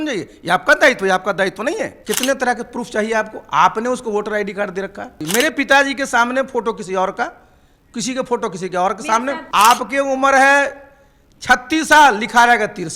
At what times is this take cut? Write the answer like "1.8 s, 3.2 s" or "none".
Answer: 2.0 s, 5.2 s, 9.4 s